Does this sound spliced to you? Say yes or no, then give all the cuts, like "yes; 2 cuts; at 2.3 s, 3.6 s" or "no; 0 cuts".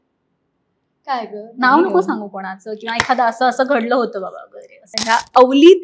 yes; 1 cut; at 4.9 s